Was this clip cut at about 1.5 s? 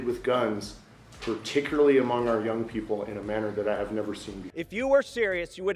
no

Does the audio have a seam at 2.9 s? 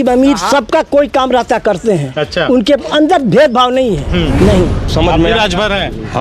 no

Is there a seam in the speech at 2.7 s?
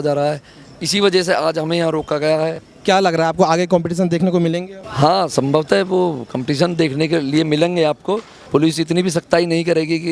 yes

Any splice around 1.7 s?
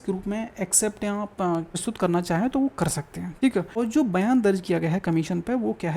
yes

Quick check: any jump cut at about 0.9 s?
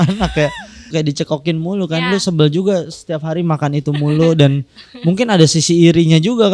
yes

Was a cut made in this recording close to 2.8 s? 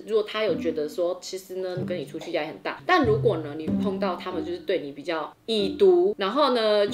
yes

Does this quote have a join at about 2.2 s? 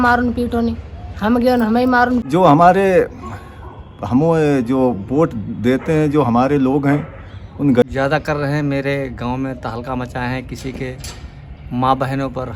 yes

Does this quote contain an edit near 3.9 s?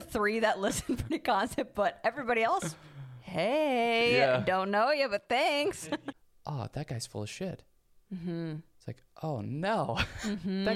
no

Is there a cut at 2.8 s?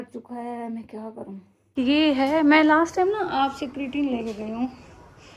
no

